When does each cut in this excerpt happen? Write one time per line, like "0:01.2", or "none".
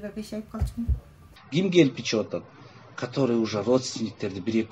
0:01.3